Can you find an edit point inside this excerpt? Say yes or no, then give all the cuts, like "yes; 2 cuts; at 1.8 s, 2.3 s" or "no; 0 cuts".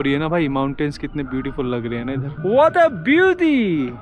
no; 0 cuts